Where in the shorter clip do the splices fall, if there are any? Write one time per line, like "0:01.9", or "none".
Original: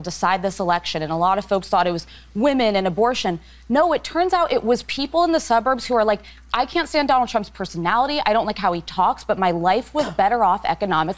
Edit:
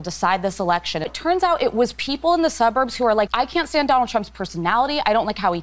0:01.1
0:03.3